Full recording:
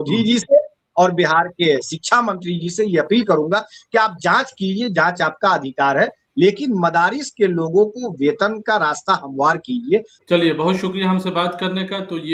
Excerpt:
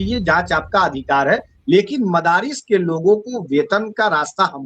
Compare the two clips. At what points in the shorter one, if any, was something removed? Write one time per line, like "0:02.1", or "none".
none